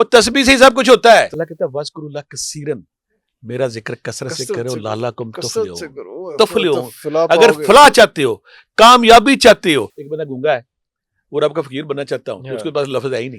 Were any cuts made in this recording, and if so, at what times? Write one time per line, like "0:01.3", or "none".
0:01.4
0:10.0